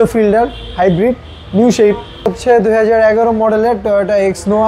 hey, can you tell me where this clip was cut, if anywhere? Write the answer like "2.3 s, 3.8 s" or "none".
2.4 s